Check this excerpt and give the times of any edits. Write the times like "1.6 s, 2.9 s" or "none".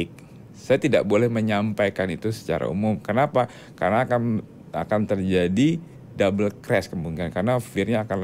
none